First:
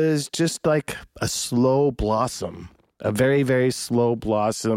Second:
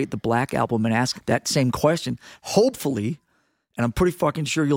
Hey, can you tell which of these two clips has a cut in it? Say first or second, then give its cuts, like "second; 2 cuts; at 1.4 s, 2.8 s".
second; 1 cut; at 1.1 s